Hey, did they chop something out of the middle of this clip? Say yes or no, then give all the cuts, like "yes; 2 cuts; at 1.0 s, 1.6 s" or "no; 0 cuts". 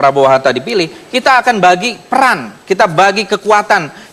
no; 0 cuts